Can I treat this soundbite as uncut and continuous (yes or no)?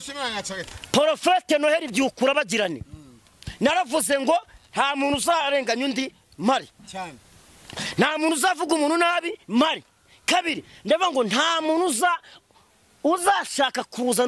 yes